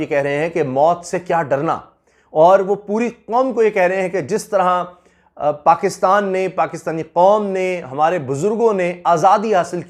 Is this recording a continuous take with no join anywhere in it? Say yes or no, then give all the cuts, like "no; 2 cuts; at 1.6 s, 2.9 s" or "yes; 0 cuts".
yes; 0 cuts